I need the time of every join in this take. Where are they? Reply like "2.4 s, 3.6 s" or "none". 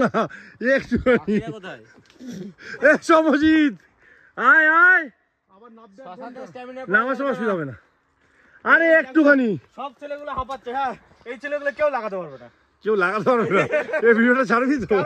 none